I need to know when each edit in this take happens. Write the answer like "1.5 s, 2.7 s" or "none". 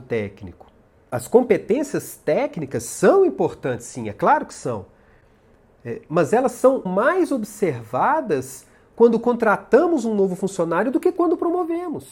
1.0 s, 6.9 s